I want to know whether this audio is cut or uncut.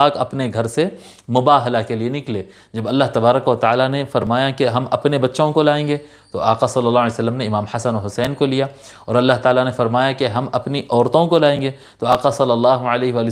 uncut